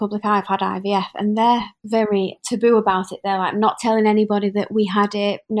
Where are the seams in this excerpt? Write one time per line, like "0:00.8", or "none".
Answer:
none